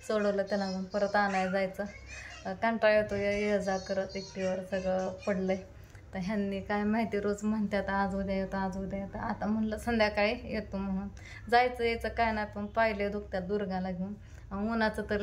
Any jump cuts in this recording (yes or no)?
no